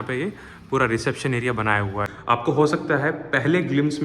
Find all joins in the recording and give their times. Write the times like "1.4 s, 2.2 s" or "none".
2.1 s